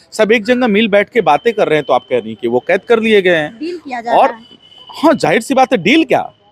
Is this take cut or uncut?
uncut